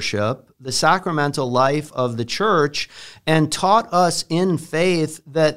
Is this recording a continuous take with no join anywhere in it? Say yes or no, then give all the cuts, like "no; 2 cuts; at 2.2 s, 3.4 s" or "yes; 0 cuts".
yes; 0 cuts